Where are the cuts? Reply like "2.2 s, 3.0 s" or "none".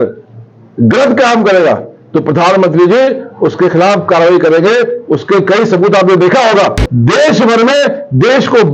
6.9 s